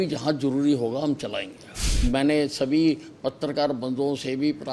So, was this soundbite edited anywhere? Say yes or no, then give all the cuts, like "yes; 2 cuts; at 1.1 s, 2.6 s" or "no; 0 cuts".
yes; 1 cut; at 1.8 s